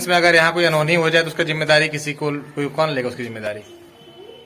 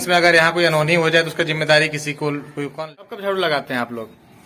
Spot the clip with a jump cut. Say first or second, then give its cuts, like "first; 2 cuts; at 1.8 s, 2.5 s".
second; 1 cut; at 2.7 s